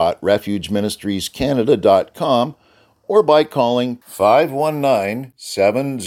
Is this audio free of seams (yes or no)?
yes